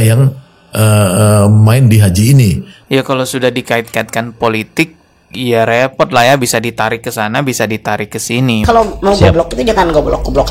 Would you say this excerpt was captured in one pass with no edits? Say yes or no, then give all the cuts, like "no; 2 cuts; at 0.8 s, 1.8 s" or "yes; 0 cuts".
no; 2 cuts; at 2.8 s, 8.6 s